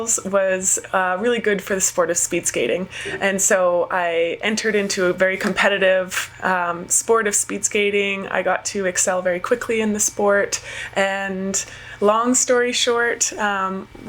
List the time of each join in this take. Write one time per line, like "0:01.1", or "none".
none